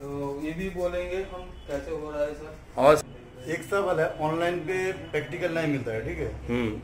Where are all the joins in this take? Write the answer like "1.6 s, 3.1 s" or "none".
3.0 s